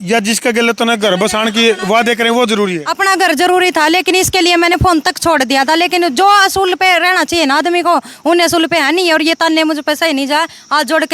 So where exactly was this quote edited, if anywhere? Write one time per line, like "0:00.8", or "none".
none